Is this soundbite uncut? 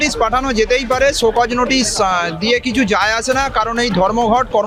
yes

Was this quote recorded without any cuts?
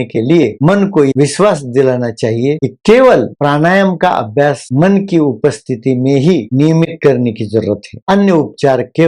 no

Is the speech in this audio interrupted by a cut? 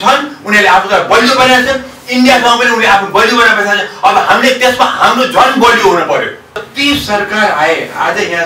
yes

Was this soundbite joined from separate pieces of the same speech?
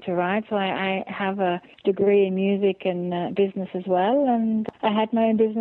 yes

